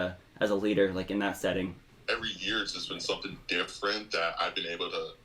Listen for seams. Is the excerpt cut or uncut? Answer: cut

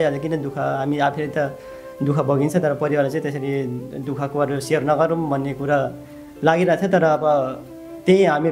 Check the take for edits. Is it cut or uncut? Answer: uncut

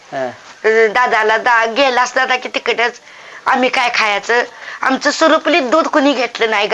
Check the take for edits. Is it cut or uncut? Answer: uncut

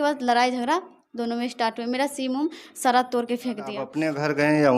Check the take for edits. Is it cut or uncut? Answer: cut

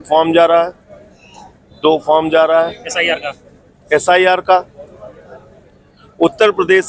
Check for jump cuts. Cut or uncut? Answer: uncut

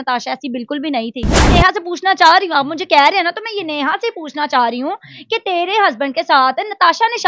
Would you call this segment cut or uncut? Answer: cut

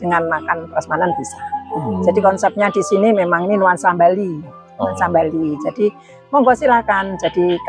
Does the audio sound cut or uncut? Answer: uncut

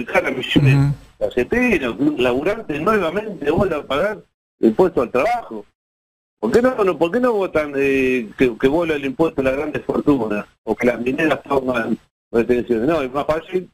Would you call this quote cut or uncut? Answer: uncut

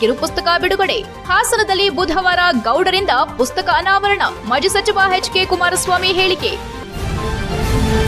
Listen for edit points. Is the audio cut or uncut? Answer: cut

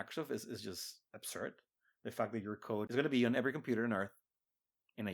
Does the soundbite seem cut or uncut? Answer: cut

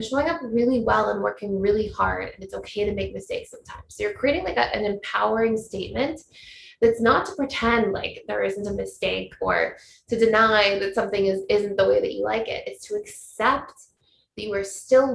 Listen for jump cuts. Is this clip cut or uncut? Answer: uncut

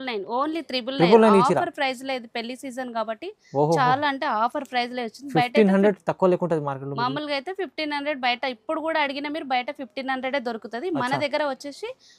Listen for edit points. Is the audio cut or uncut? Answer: uncut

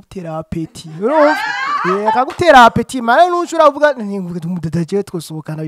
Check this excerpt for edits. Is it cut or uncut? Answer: uncut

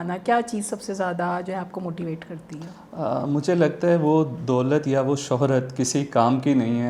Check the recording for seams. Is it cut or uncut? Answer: uncut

